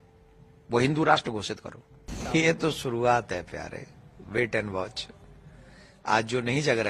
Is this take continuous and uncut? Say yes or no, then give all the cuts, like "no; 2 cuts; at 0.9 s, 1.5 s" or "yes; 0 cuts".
no; 1 cut; at 2.1 s